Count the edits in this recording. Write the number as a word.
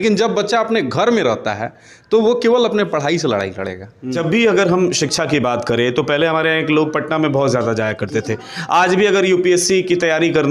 one